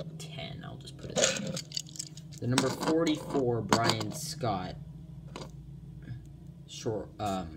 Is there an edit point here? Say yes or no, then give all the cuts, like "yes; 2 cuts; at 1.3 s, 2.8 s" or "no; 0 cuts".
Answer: no; 0 cuts